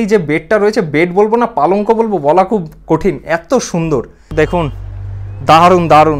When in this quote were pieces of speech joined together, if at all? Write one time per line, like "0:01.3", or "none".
0:04.3